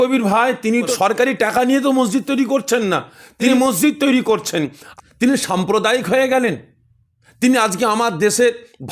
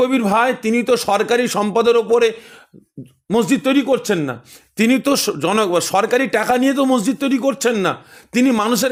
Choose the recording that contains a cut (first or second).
first